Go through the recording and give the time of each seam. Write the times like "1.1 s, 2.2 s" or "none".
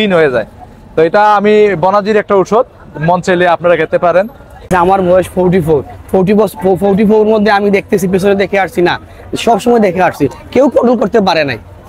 4.6 s